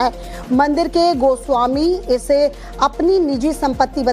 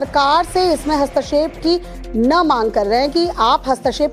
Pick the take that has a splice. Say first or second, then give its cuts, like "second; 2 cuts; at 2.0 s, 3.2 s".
first; 1 cut; at 1.4 s